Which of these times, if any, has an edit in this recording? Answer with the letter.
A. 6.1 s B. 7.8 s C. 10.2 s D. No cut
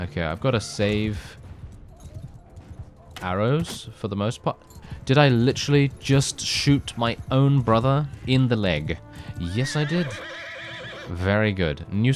D